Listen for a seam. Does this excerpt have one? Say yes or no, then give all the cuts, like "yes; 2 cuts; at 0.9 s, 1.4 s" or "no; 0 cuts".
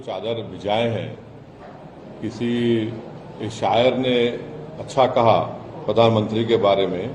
no; 0 cuts